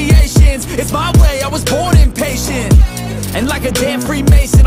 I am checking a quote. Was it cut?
no; 0 cuts

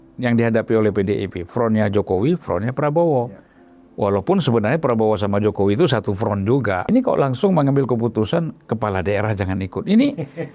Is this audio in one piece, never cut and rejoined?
no; 1 cut; at 6.8 s

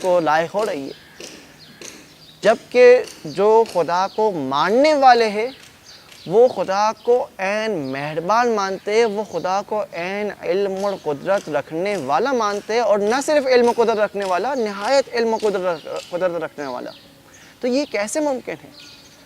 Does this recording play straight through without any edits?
yes; 0 cuts

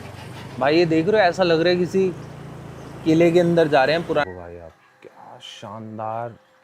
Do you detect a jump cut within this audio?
yes; 1 cut; at 4.2 s

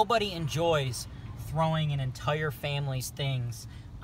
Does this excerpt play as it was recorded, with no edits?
yes; 0 cuts

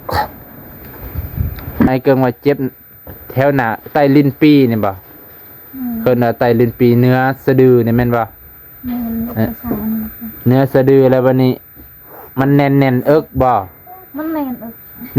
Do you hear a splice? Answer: yes; 1 cut; at 1.9 s

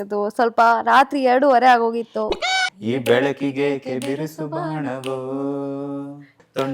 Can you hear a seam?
yes; 1 cut; at 2.3 s

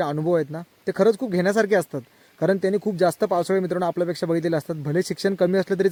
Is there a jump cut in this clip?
no; 0 cuts

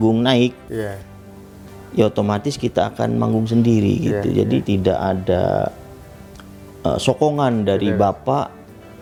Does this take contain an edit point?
no; 0 cuts

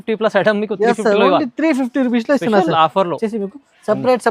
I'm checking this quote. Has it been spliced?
yes; 1 cut; at 3.2 s

